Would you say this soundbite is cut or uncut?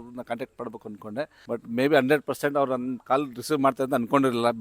cut